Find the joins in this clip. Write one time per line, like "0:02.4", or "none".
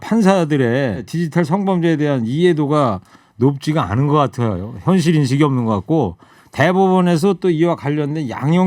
0:01.1